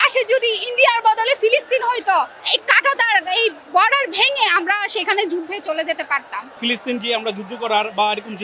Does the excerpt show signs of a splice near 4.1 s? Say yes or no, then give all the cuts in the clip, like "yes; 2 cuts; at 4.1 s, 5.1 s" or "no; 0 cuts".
no; 2 cuts; at 2.4 s, 6.5 s